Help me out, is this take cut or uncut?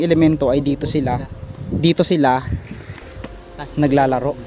uncut